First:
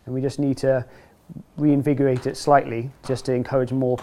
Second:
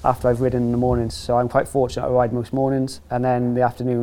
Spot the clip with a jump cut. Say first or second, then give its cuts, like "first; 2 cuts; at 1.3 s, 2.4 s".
second; 1 cut; at 3.0 s